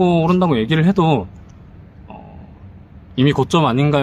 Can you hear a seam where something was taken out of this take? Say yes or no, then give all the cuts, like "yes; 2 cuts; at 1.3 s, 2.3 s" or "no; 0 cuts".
no; 0 cuts